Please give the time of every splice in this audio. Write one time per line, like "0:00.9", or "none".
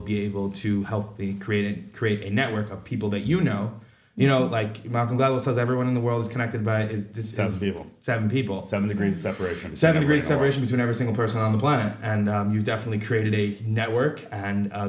none